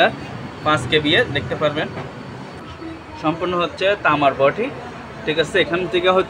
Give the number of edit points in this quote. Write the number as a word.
one